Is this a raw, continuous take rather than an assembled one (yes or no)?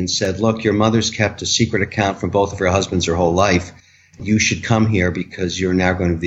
yes